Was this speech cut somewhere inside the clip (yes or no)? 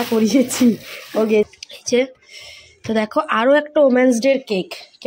yes